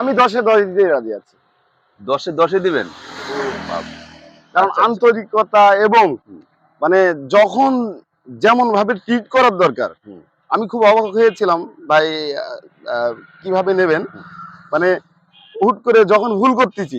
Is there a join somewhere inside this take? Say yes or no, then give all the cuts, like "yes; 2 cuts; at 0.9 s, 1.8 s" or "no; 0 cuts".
no; 0 cuts